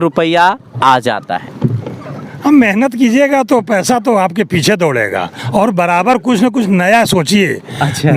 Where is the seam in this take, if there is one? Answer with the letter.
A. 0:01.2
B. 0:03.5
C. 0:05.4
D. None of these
C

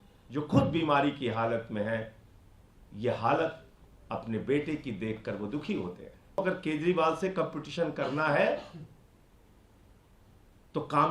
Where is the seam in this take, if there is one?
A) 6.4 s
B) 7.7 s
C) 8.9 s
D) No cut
A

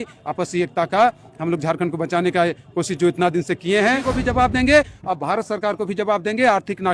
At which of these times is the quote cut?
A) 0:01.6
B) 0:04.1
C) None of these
B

